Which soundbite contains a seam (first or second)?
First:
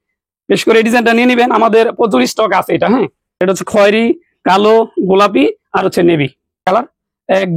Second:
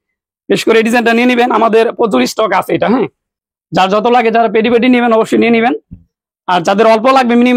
first